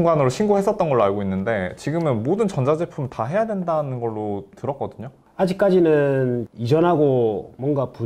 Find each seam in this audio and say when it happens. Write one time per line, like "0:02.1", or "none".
0:05.2

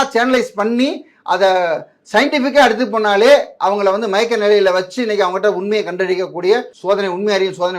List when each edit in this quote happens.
0:06.7

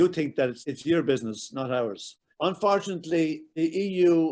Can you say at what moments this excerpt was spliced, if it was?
0:02.2

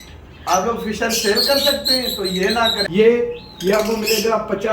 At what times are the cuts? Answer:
0:02.8

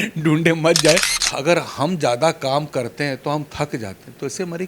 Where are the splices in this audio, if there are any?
0:01.1

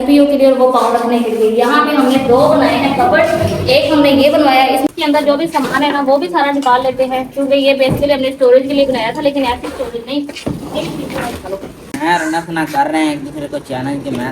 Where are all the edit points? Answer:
0:04.9
0:11.8

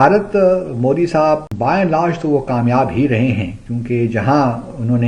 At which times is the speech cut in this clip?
0:01.5

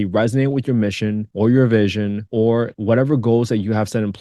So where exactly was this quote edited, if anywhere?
0:01.3
0:02.5

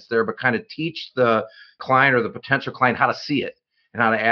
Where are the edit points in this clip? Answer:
0:01.8

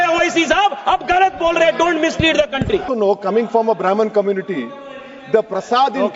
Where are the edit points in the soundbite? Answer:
0:02.9

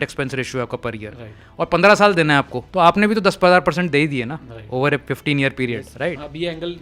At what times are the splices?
0:02.6
0:05.0
0:05.9

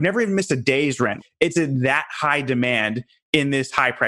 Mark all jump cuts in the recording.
0:01.1

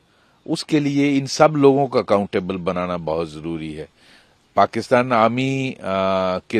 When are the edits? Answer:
none

